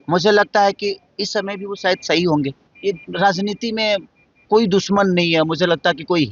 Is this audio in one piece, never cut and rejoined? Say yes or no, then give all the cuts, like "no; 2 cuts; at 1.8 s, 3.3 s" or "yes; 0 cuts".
no; 1 cut; at 2.7 s